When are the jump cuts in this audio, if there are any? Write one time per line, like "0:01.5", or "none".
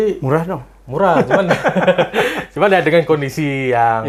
none